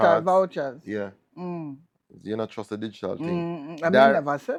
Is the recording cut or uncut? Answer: uncut